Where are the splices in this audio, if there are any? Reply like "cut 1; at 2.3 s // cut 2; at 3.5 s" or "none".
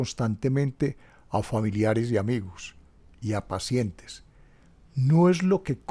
none